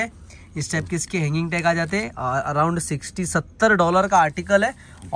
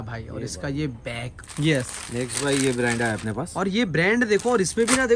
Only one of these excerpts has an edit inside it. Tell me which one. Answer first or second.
second